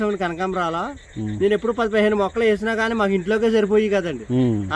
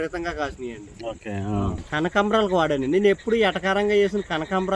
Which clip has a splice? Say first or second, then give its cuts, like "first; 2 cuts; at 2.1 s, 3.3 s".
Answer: second; 1 cut; at 1.8 s